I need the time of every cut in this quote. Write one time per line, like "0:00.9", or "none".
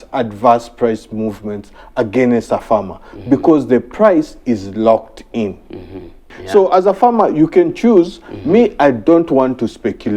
0:06.3

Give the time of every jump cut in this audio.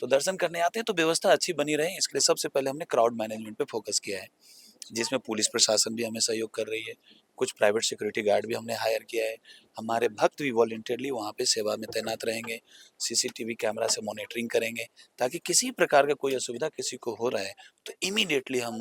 none

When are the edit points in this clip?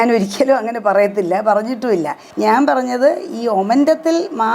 0:02.2

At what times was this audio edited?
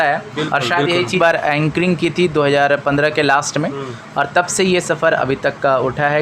0:01.2

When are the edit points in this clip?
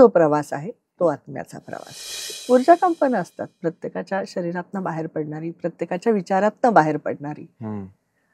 0:02.4

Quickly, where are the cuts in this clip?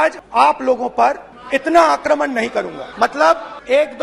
none

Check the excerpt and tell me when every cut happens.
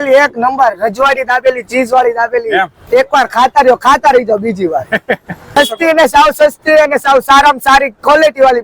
0:05.5

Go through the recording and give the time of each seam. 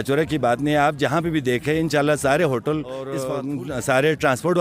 0:03.2

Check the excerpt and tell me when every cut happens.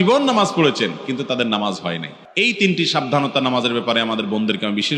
0:02.2

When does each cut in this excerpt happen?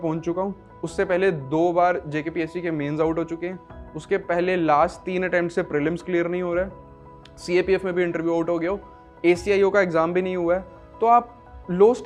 none

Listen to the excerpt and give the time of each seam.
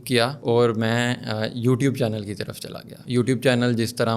none

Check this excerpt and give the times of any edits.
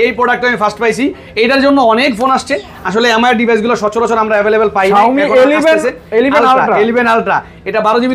none

